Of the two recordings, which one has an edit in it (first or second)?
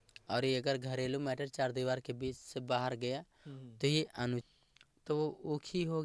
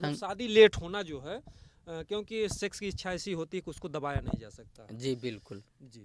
first